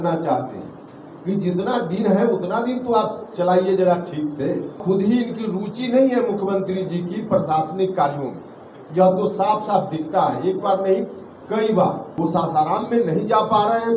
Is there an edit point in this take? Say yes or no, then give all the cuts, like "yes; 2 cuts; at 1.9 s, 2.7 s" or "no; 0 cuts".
yes; 2 cuts; at 4.8 s, 12.1 s